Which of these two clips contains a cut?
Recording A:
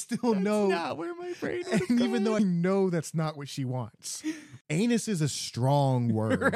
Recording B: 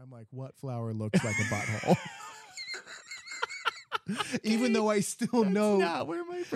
A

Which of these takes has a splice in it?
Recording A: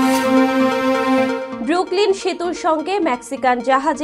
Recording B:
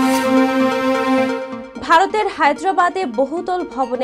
A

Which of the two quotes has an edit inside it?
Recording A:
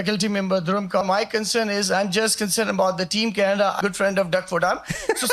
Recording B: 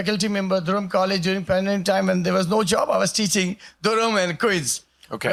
A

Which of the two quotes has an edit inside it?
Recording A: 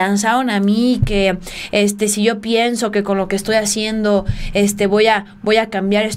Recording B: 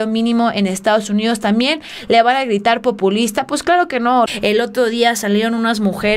B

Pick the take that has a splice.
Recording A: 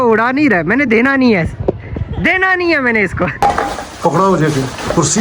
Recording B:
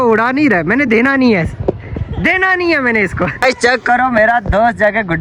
A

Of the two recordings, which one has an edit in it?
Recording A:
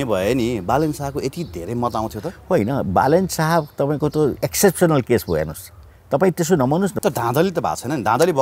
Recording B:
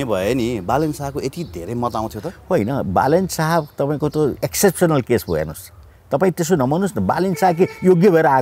A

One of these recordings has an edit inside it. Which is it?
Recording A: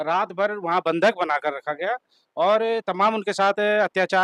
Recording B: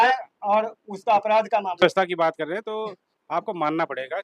B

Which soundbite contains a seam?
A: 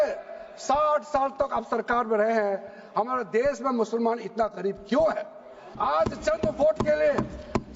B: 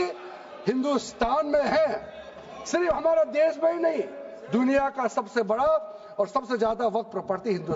A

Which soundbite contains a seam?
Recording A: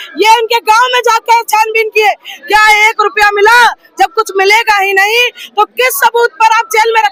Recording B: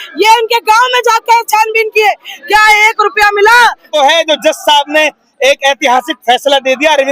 B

